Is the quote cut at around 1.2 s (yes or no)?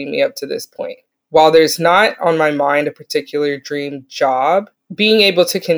no